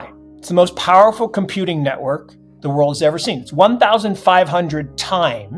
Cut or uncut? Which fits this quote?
uncut